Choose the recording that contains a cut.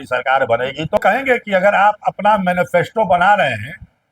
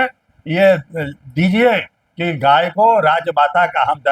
first; 1 cut; at 1.0 s

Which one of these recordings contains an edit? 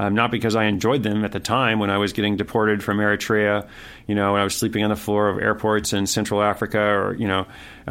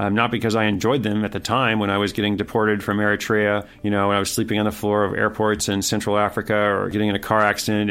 second; 2 cuts; at 3.7 s, 6.9 s

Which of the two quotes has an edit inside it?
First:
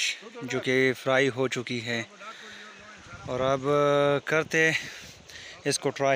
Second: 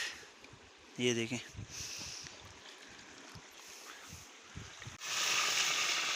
second; 1 cut; at 5.1 s

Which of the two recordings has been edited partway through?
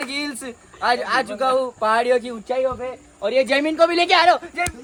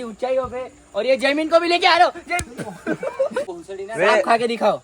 second; 1 cut; at 3.5 s

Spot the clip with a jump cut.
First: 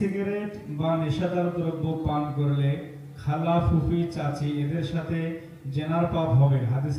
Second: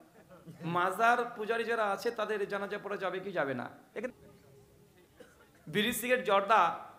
second; 1 cut; at 4.0 s

